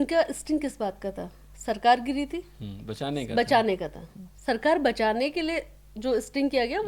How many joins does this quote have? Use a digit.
0